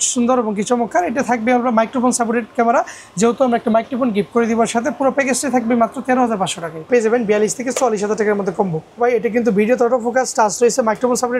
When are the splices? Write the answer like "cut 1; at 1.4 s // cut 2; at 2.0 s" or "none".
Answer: cut 1; at 6.9 s // cut 2; at 9.0 s

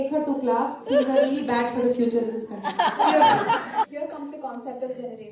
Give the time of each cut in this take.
cut 1; at 3.9 s

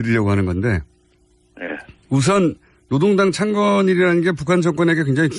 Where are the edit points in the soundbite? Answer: cut 1; at 3.0 s

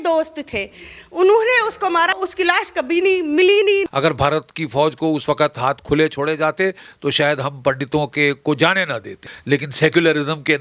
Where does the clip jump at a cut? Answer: cut 1; at 2.2 s // cut 2; at 3.9 s // cut 3; at 9.3 s

